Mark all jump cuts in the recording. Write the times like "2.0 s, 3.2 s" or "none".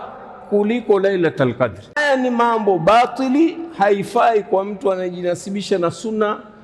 2.0 s